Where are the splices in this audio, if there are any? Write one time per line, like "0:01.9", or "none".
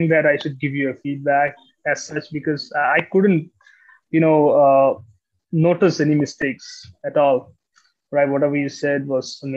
none